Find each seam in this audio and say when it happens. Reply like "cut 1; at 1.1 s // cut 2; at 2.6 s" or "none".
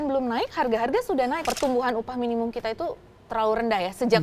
cut 1; at 1.4 s